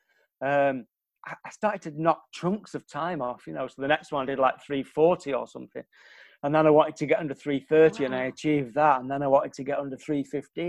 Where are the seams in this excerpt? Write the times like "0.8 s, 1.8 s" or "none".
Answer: none

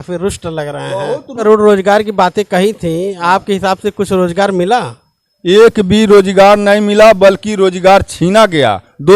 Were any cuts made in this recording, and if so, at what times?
1.4 s

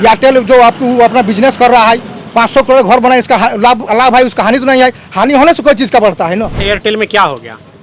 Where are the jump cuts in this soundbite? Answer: 6.6 s

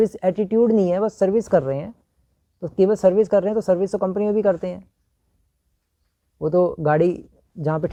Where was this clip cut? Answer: none

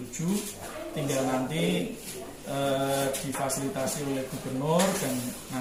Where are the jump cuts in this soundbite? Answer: none

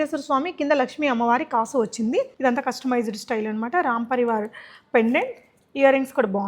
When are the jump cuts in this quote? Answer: 2.3 s

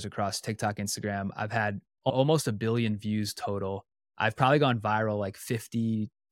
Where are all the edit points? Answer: 2.1 s

